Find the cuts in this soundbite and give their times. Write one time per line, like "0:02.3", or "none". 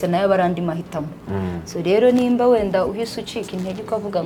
none

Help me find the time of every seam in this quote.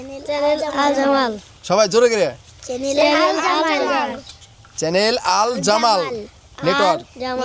none

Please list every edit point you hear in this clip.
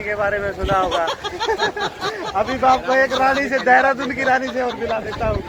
none

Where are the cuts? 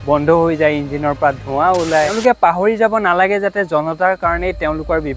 0:02.2

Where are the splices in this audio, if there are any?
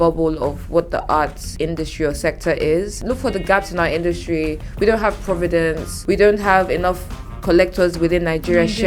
0:01.4
0:03.0
0:05.9

